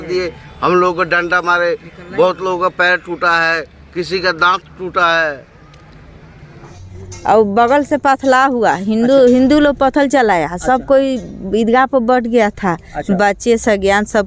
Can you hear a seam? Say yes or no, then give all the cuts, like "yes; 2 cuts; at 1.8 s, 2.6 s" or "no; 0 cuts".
yes; 1 cut; at 6.8 s